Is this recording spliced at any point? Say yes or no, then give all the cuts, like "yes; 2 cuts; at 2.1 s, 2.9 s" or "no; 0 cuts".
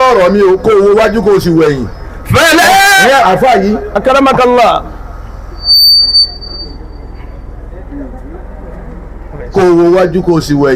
no; 0 cuts